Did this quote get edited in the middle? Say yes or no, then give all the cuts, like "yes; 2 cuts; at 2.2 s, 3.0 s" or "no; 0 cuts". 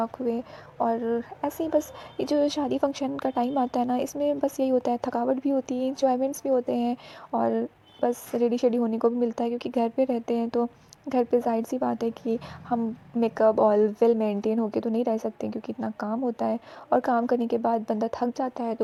no; 0 cuts